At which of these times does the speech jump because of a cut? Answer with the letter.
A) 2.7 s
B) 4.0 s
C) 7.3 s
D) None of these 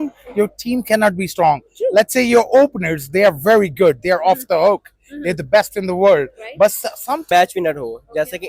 C